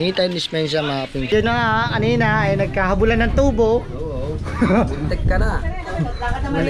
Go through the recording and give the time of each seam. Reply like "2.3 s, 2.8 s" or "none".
1.3 s